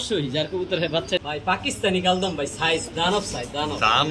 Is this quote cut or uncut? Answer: cut